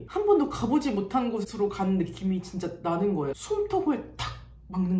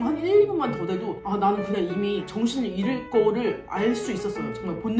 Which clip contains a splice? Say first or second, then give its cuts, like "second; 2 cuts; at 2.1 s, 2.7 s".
first; 1 cut; at 3.4 s